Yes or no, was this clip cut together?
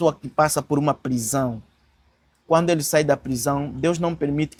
no